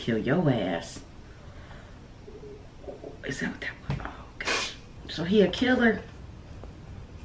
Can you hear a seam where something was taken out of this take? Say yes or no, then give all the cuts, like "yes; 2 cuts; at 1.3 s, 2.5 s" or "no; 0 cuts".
no; 0 cuts